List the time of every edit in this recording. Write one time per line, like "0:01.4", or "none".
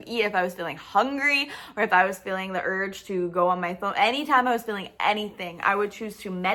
none